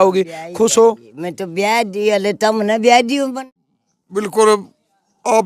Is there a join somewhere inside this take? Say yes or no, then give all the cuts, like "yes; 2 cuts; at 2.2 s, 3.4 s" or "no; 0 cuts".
yes; 1 cut; at 3.4 s